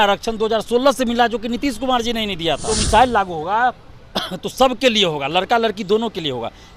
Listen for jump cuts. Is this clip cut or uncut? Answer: cut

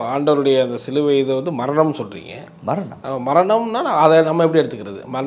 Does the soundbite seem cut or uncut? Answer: uncut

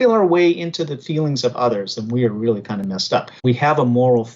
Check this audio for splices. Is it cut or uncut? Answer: cut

